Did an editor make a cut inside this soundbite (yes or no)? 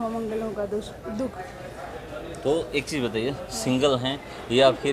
no